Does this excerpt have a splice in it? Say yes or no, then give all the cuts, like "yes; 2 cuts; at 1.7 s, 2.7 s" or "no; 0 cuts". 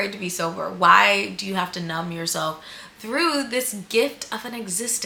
no; 0 cuts